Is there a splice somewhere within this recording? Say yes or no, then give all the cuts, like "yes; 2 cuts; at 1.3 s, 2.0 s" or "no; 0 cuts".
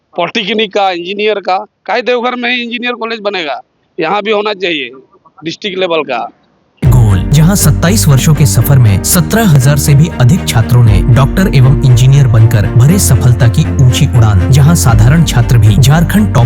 no; 0 cuts